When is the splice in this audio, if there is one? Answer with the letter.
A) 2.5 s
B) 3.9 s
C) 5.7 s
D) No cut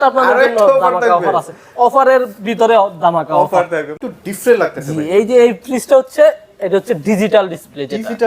B